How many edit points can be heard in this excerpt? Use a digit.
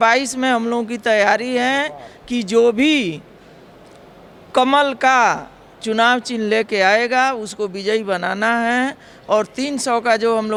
0